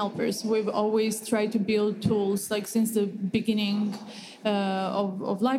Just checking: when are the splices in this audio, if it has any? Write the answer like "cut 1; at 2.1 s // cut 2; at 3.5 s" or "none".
none